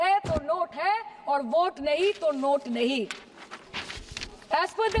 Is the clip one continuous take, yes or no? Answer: yes